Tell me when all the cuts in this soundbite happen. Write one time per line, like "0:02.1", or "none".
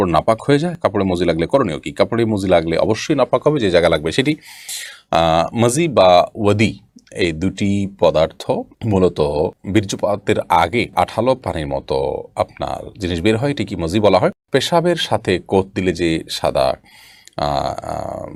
none